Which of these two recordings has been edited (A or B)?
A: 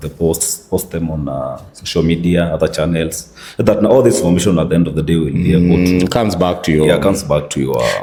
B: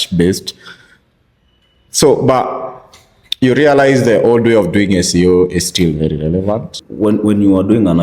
B